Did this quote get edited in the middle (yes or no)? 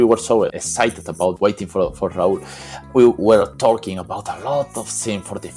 no